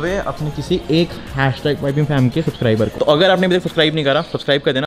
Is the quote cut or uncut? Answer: uncut